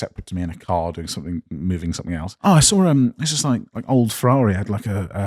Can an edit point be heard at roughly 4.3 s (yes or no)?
no